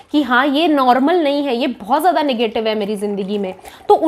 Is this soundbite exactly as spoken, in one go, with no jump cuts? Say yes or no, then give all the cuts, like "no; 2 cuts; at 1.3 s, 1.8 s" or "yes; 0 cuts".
yes; 0 cuts